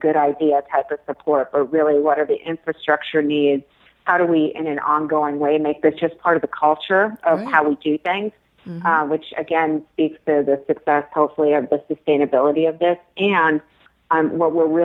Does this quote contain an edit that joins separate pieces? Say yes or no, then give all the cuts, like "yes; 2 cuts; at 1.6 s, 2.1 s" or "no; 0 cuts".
no; 0 cuts